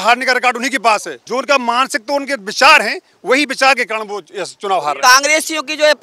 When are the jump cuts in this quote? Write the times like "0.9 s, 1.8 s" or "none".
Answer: 1.2 s, 5.0 s